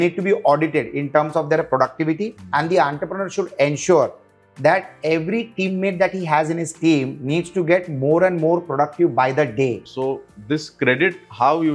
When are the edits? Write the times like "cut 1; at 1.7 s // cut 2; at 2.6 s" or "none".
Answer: cut 1; at 9.9 s